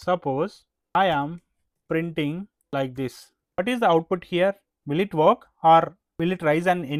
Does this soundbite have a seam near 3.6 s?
no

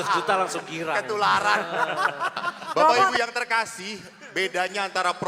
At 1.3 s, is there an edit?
no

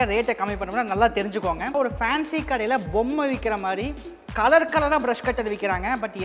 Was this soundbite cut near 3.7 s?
no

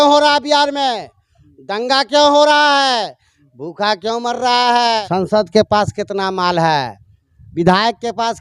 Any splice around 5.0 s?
yes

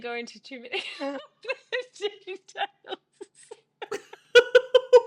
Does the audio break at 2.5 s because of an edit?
no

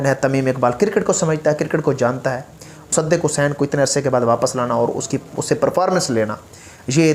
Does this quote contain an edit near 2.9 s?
yes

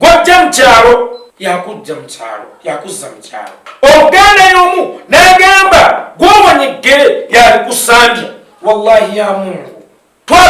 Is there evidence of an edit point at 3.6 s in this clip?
yes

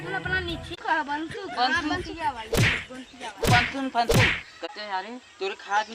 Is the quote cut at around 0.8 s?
yes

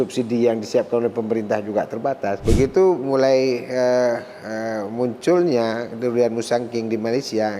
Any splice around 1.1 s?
no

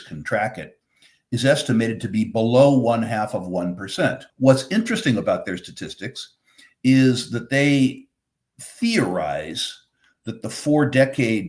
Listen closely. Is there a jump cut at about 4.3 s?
yes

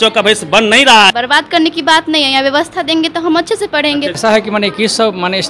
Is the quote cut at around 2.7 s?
no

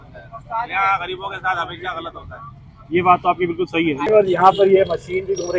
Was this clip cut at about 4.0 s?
yes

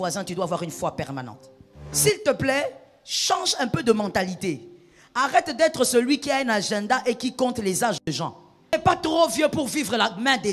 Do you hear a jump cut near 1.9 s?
yes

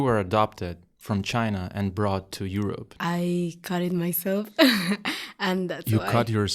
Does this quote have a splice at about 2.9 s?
yes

